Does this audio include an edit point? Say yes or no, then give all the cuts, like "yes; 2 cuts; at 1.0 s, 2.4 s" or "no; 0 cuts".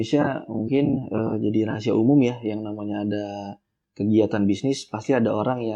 no; 0 cuts